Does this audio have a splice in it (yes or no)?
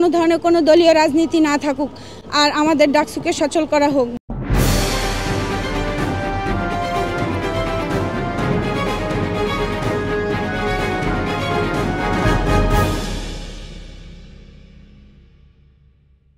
no